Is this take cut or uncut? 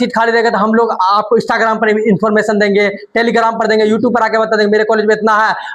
uncut